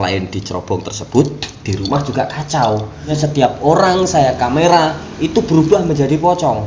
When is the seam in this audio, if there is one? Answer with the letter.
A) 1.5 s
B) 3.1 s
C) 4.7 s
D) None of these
B